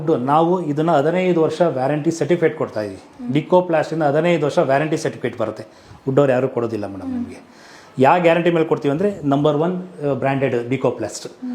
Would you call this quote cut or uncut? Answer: uncut